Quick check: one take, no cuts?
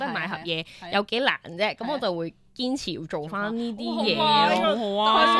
yes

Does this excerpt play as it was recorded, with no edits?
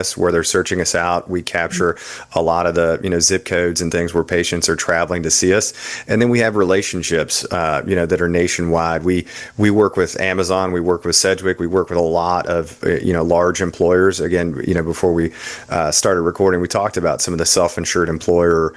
yes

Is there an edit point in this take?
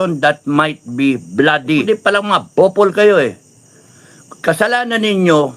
yes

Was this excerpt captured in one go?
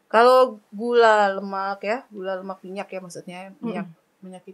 yes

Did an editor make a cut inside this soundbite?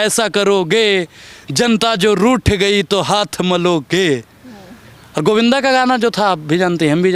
no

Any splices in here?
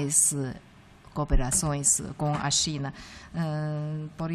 no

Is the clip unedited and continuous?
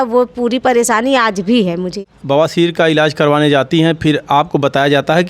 no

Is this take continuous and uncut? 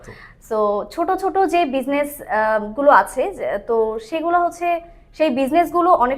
yes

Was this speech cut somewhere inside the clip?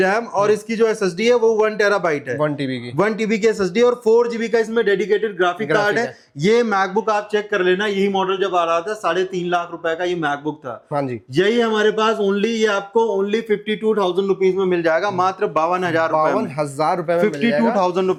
no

